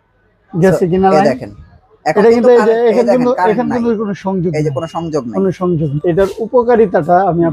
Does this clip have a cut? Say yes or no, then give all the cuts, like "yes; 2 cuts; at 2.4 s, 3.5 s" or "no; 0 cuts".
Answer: yes; 1 cut; at 5.9 s